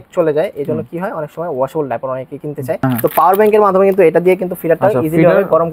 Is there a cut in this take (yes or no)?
yes